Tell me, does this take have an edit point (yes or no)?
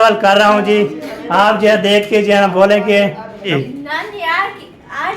yes